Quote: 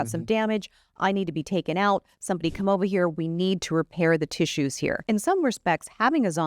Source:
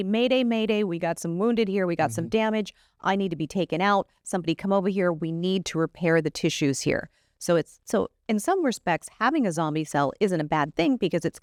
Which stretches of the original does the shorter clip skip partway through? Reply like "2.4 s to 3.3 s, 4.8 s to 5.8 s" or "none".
7.0 s to 8.2 s

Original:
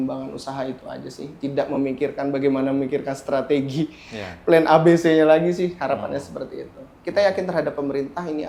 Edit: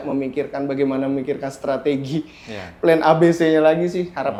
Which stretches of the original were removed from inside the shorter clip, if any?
none

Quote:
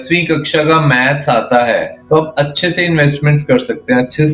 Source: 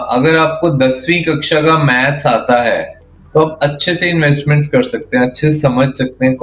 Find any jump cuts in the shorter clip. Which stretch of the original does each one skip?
2.9 s to 3.2 s

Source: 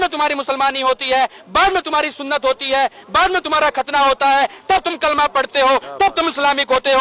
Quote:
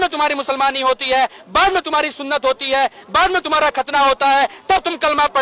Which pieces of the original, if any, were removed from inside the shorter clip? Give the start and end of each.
none

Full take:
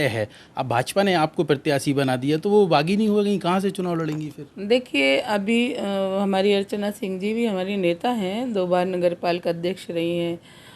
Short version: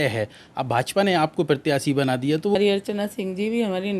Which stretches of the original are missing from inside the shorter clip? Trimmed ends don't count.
2.6 s to 6.4 s

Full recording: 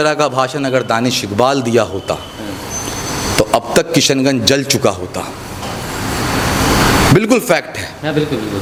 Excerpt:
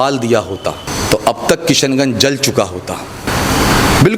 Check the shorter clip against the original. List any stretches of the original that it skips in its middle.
2.3 s to 3.1 s, 5.5 s to 6.4 s

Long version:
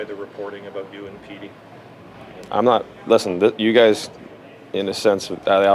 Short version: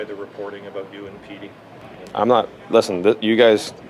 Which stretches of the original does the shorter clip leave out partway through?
1.8 s to 2.2 s

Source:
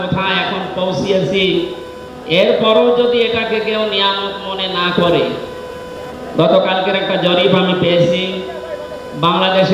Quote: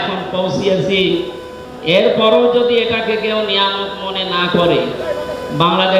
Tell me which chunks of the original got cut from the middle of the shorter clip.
5.4 s to 8.6 s

